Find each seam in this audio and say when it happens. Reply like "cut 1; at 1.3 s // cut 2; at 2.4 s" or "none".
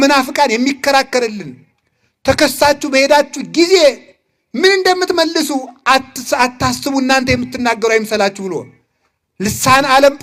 none